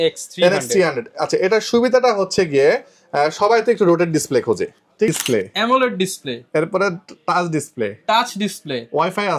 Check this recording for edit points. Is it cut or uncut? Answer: cut